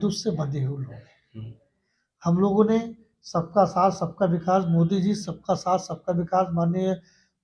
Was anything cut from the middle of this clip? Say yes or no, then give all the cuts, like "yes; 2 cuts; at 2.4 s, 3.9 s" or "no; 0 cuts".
no; 0 cuts